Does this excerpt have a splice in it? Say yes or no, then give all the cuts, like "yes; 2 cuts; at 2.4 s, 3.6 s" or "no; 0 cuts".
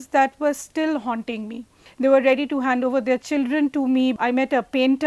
yes; 2 cuts; at 1.8 s, 4.2 s